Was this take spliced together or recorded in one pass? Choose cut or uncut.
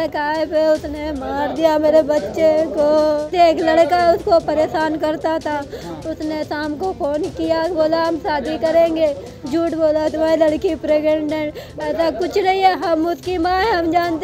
cut